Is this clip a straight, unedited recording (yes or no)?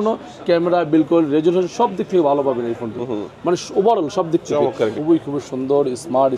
no